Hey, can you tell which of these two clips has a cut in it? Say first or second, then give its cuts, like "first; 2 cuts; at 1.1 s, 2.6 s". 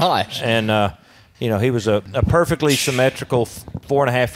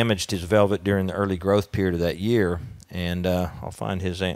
first; 1 cut; at 2.1 s